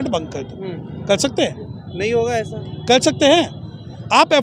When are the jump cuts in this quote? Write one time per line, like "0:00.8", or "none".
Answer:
none